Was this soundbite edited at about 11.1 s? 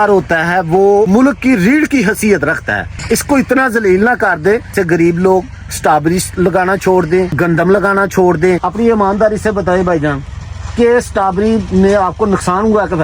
no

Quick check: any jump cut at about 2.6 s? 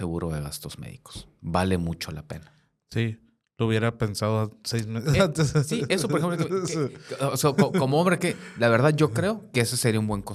no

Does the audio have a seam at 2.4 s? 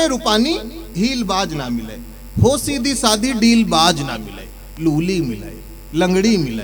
no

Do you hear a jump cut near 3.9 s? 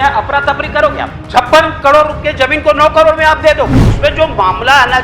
yes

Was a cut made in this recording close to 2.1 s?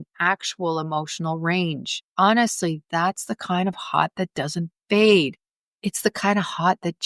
yes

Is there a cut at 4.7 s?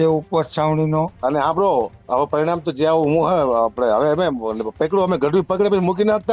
no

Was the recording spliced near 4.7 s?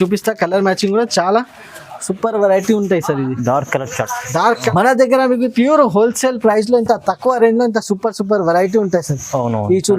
yes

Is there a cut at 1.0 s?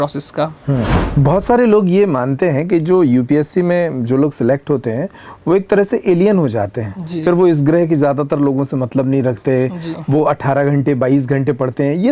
yes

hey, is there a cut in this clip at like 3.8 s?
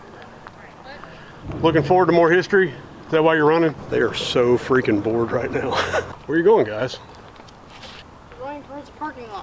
yes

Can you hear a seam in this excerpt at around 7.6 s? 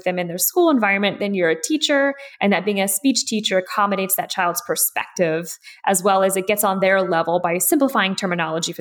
yes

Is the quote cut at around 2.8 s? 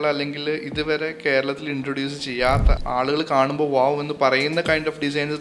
yes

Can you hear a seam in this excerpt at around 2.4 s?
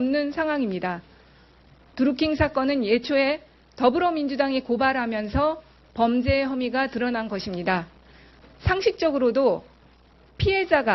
yes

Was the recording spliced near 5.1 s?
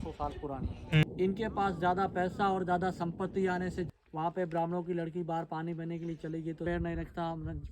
no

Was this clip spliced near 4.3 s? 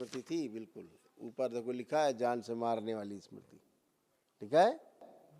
no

